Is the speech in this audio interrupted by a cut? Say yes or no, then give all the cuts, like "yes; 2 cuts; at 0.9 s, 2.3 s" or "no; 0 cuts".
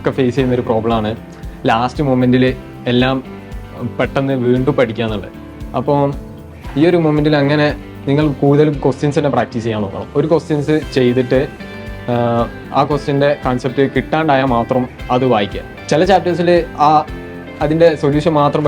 no; 0 cuts